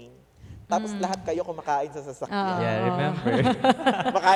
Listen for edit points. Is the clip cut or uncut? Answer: uncut